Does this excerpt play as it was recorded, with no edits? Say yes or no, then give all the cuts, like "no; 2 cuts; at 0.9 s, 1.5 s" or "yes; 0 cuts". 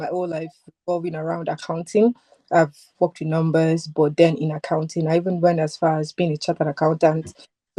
yes; 0 cuts